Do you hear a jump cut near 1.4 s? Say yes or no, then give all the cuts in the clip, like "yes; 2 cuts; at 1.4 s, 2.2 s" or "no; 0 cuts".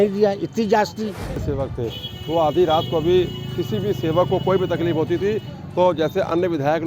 yes; 1 cut; at 1.4 s